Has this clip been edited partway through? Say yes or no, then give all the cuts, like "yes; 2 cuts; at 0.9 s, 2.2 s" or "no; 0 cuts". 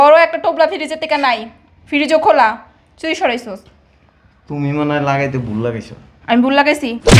no; 0 cuts